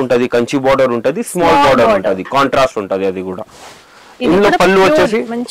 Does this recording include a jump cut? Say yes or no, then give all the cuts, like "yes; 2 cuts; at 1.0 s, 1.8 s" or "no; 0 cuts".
no; 0 cuts